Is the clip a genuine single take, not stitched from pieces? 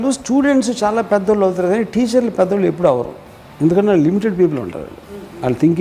yes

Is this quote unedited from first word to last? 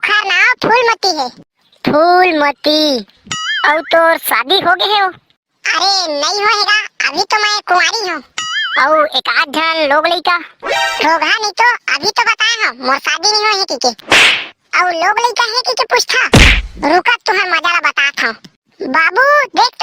yes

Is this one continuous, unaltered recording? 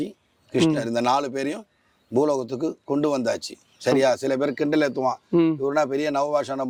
yes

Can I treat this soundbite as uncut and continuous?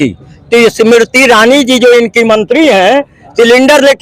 yes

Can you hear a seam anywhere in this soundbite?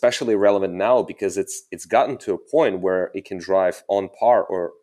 no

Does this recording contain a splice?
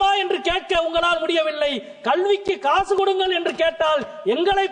no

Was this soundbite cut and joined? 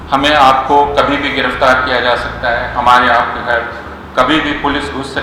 no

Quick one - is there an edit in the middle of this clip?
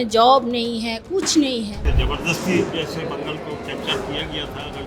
yes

